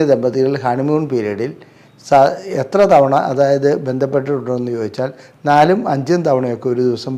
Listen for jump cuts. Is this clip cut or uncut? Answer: uncut